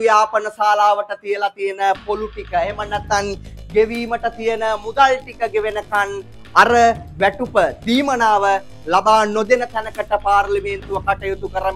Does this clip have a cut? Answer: no; 0 cuts

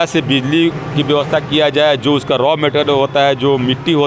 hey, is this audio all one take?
yes; 0 cuts

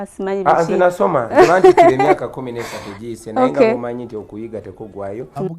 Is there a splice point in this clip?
yes; 1 cut; at 0.9 s

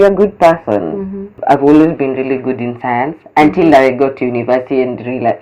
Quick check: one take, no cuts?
no; 1 cut; at 1.4 s

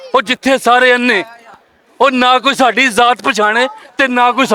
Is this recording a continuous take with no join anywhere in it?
yes; 0 cuts

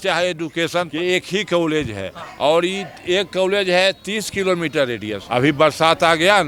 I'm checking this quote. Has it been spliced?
yes; 2 cuts; at 0.9 s, 5.2 s

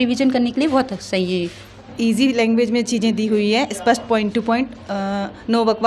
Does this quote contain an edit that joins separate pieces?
yes; 1 cut; at 1.9 s

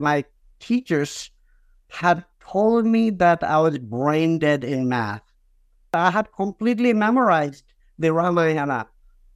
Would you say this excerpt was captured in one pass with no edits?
no; 1 cut; at 5.9 s

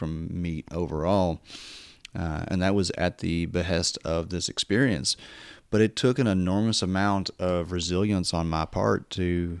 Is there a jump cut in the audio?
no; 0 cuts

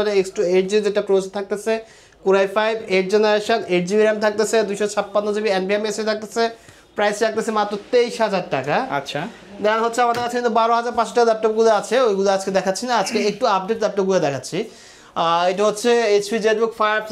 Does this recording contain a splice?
no; 0 cuts

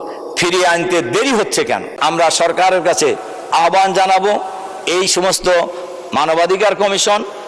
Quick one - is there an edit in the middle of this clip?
yes; 1 cut; at 1.9 s

